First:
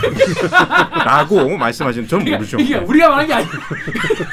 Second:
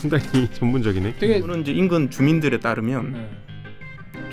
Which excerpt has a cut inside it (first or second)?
second